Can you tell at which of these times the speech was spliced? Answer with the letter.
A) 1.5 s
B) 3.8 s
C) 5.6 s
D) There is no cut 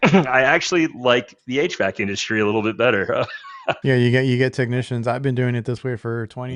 B